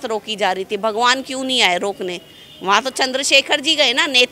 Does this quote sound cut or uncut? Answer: uncut